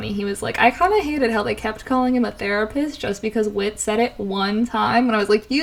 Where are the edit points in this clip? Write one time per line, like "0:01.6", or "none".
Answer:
none